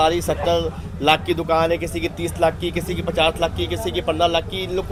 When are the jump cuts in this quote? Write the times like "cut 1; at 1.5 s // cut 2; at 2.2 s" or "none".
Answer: none